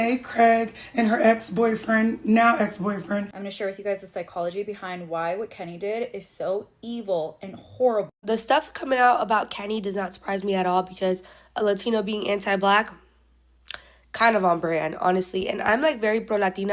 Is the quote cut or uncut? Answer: cut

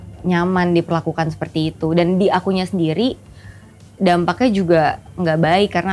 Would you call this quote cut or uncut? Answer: uncut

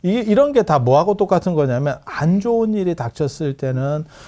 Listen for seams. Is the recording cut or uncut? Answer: uncut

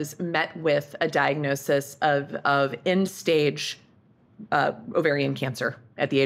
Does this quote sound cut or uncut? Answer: uncut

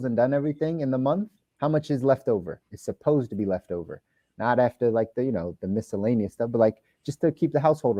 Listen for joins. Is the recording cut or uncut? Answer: uncut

